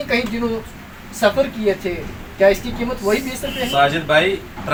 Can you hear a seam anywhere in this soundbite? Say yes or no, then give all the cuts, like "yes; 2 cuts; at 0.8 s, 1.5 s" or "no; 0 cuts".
no; 0 cuts